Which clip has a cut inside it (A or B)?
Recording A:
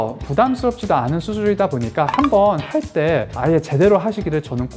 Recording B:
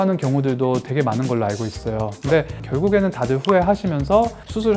B